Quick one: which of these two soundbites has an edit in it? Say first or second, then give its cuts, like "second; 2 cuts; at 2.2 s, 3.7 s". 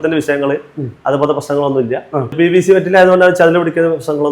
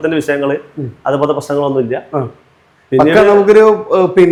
first; 1 cut; at 2.3 s